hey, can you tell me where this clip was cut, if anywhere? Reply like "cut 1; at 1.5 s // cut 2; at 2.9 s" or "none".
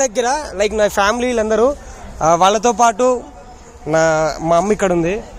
none